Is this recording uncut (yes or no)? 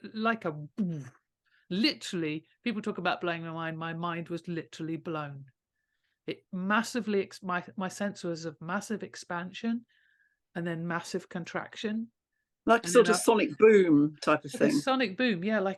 yes